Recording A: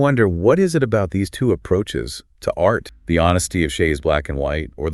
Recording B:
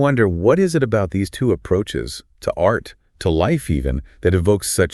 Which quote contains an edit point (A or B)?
A